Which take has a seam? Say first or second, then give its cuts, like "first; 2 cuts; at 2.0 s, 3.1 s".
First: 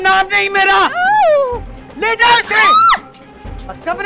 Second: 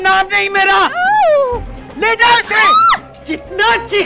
second; 1 cut; at 3.1 s